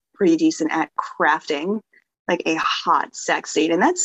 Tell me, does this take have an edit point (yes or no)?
no